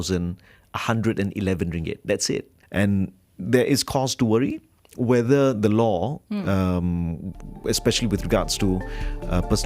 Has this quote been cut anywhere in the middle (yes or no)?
yes